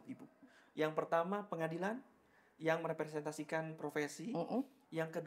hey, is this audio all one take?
yes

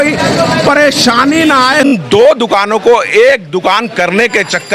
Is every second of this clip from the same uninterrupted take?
no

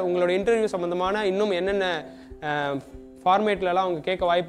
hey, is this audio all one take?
yes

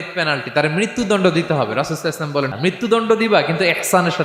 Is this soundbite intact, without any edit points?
no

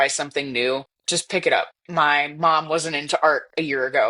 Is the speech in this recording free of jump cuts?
no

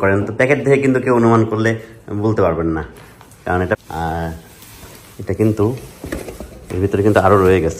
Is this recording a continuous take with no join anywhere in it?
no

